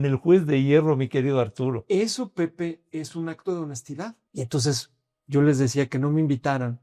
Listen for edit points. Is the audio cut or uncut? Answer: cut